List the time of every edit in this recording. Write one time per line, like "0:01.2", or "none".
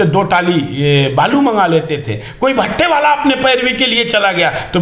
none